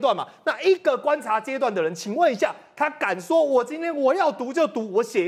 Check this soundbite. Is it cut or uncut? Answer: uncut